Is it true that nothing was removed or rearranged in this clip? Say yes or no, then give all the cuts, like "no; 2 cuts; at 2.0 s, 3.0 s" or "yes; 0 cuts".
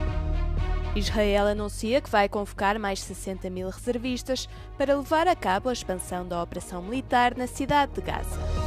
no; 1 cut; at 0.9 s